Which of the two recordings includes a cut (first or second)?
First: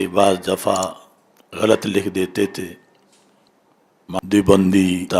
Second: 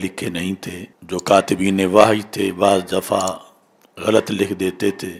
first